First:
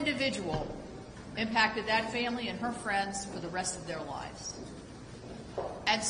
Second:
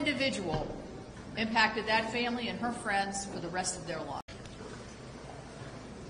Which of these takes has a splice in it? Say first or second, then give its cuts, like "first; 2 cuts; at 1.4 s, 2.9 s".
first; 1 cut; at 4.2 s